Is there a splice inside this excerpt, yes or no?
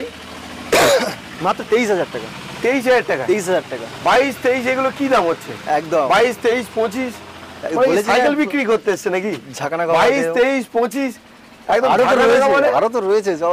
no